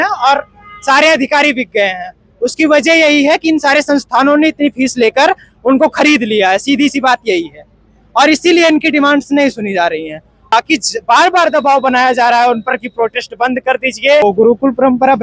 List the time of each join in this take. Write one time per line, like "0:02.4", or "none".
0:10.5
0:14.2